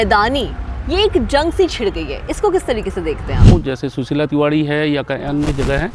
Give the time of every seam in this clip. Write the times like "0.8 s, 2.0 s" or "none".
3.5 s